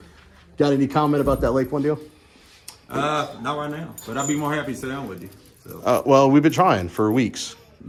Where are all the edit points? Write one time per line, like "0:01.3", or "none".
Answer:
none